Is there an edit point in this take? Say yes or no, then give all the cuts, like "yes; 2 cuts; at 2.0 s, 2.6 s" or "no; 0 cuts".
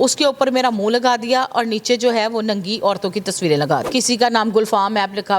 yes; 1 cut; at 3.9 s